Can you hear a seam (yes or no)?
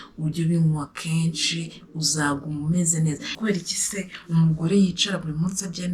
yes